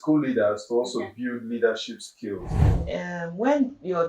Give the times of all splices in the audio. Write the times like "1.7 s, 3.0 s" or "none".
2.7 s